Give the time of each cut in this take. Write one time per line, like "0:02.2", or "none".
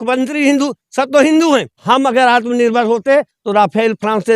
0:01.7